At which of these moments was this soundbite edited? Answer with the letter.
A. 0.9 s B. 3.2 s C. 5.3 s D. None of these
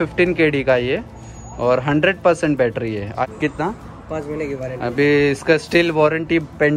B